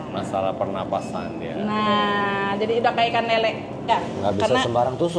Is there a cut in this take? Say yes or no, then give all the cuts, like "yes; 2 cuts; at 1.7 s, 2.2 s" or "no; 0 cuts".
yes; 1 cut; at 3.9 s